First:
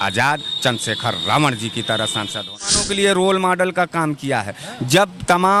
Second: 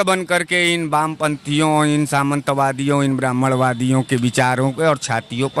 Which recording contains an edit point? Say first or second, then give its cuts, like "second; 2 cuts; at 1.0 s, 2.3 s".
first; 1 cut; at 2.8 s